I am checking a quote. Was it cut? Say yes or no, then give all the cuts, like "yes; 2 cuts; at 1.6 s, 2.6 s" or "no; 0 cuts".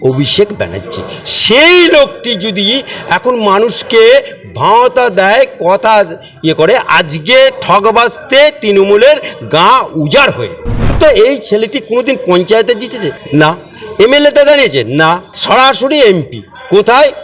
yes; 3 cuts; at 10.9 s, 13.2 s, 15.3 s